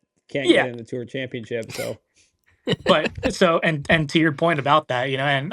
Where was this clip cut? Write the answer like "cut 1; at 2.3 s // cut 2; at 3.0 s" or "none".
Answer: none